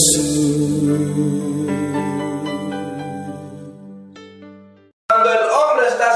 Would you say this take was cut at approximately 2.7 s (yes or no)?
no